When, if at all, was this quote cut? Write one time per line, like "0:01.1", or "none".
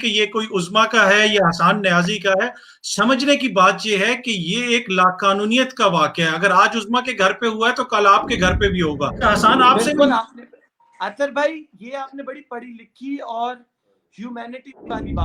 0:09.2